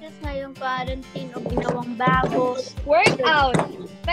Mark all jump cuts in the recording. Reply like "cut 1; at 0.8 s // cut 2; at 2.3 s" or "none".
cut 1; at 2.7 s